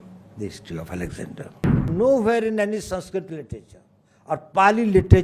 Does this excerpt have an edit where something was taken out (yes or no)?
yes